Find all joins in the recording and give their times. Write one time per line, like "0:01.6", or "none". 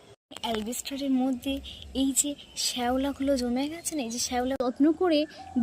0:04.6

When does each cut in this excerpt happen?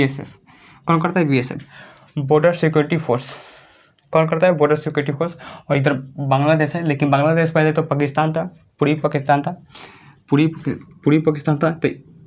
none

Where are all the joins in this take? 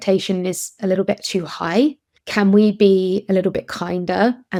none

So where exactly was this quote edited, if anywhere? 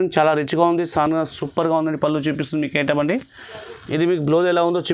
none

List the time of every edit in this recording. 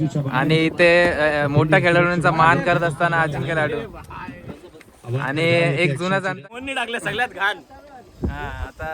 0:06.6

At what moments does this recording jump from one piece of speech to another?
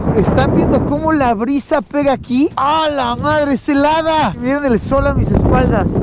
0:02.6
0:04.4

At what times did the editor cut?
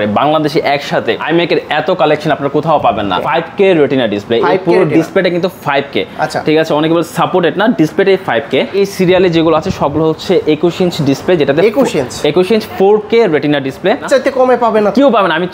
0:03.2
0:08.7
0:14.1

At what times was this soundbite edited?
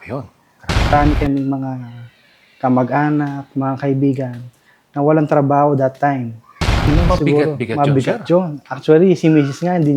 0:00.9
0:06.8

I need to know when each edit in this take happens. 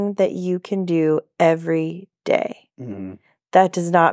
none

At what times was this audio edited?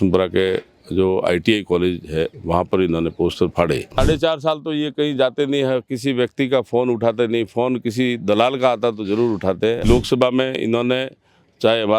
0:03.9
0:09.8

